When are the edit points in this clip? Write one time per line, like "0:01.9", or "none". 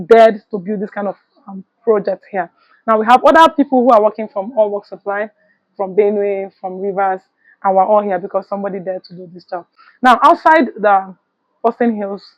none